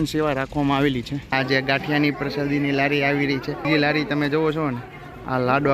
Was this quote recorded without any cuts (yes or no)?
no